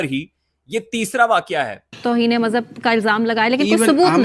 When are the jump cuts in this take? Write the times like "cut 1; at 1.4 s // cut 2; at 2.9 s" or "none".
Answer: cut 1; at 2.0 s

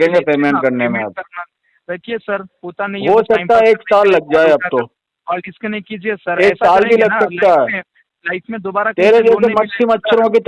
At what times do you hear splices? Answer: none

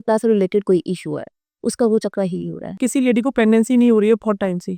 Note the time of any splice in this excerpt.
cut 1; at 2.8 s

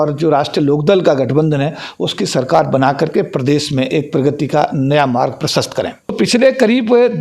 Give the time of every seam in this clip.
cut 1; at 6.1 s

